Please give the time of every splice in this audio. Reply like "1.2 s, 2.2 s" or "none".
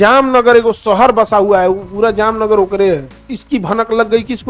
3.1 s